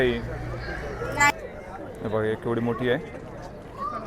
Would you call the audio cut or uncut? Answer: cut